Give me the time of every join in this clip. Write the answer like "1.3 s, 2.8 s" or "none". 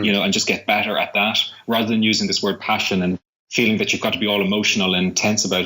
3.3 s